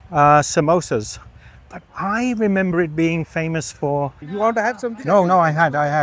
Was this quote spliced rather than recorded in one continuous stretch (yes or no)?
yes